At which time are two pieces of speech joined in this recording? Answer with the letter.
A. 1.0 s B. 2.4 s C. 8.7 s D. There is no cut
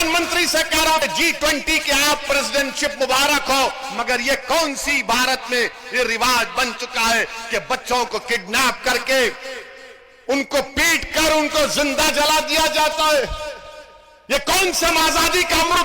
A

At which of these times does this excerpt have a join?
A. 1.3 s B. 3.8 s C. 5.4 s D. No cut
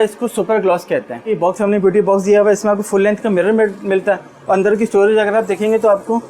A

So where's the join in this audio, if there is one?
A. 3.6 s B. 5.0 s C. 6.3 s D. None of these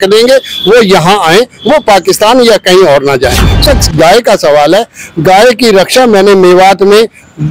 A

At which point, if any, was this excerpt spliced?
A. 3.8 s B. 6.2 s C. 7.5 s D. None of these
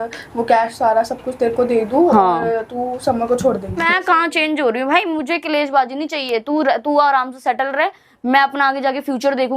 A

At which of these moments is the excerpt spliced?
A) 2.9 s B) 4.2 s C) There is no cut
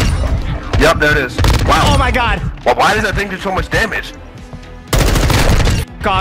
B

